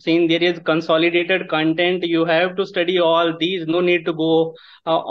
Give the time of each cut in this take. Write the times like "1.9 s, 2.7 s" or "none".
none

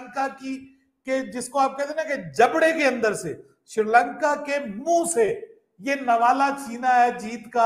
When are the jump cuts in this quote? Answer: none

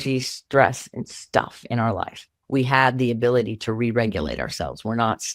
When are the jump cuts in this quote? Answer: 2.3 s

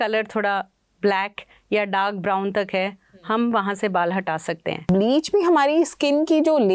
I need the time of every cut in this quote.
4.9 s

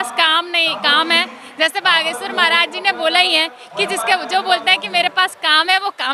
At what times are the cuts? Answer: none

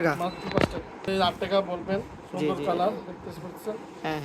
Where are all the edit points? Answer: 1.1 s

